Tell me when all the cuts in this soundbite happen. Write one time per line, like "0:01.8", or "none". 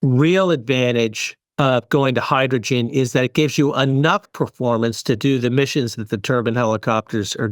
none